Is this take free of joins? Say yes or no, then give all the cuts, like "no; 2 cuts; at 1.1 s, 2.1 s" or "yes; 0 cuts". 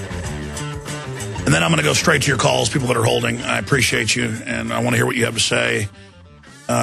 yes; 0 cuts